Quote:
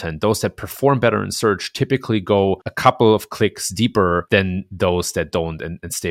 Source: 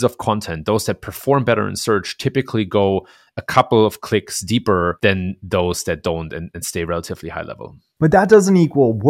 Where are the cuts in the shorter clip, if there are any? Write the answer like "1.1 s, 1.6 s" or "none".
2.7 s